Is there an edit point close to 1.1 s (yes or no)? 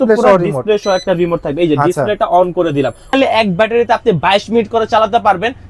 no